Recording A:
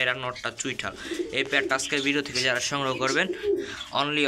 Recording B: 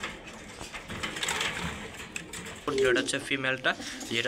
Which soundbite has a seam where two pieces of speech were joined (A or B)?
B